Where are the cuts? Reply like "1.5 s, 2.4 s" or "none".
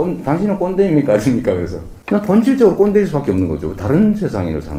none